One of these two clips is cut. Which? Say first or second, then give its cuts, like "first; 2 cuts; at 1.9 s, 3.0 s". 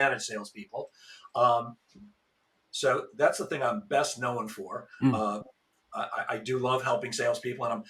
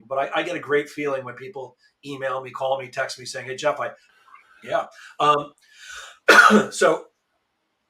second; 1 cut; at 4.0 s